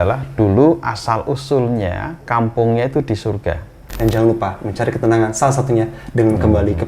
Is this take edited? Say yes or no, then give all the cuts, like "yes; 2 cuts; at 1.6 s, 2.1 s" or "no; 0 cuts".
yes; 1 cut; at 3.8 s